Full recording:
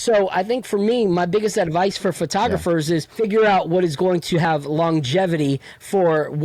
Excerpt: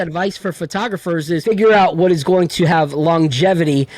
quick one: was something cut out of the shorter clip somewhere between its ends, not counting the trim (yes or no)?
yes